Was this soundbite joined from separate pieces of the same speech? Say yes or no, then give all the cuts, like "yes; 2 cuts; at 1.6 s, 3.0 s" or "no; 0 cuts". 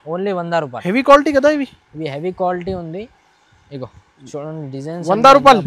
no; 0 cuts